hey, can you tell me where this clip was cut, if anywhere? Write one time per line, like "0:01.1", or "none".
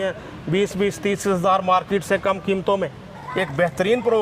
0:03.2